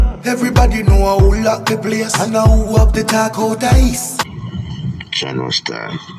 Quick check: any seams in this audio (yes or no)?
yes